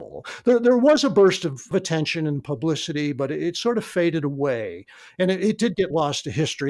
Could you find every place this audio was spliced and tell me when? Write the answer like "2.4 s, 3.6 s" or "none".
1.7 s